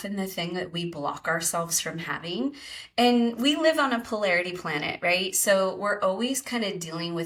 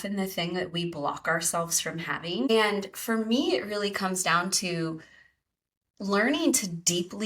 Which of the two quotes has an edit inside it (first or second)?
second